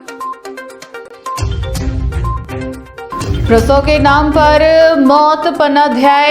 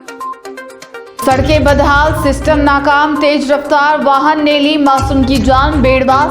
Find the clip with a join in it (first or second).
first